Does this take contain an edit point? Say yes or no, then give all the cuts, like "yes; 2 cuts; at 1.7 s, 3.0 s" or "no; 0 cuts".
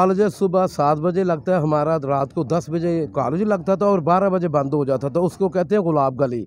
no; 0 cuts